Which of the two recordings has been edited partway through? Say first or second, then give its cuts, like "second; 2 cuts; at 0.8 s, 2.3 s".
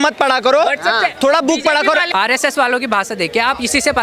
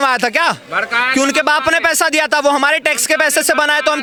first; 1 cut; at 2.1 s